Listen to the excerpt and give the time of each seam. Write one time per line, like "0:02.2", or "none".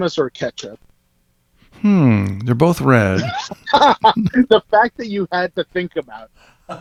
none